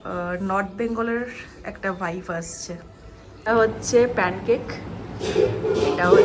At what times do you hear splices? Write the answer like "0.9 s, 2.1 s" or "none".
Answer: 3.5 s